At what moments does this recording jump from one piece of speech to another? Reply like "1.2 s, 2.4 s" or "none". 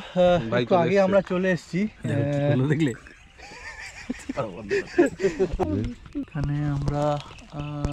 5.6 s